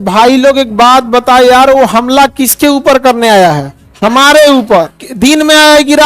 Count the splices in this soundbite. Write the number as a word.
zero